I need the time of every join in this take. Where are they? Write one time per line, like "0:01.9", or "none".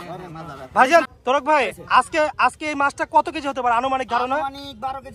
0:01.1